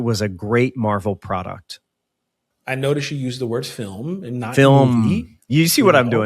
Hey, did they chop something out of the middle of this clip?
yes; 1 cut; at 2.5 s

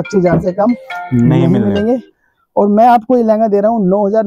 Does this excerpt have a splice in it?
no; 0 cuts

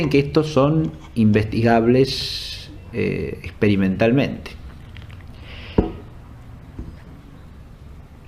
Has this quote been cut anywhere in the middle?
yes; 1 cut; at 3.6 s

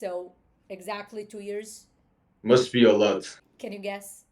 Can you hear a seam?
yes; 1 cut; at 3.4 s

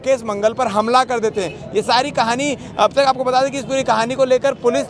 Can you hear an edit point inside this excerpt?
no; 0 cuts

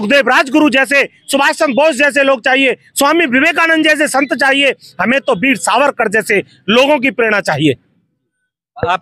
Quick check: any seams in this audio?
no; 0 cuts

